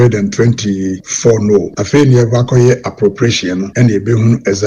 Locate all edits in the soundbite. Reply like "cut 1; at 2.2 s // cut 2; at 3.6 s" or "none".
cut 1; at 1.0 s // cut 2; at 1.8 s // cut 3; at 3.7 s